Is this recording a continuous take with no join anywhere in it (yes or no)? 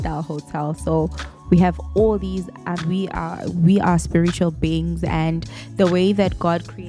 no